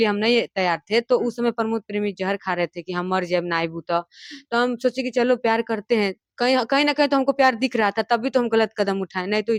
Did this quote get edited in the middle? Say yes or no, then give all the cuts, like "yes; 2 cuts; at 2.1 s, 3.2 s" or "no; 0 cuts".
no; 0 cuts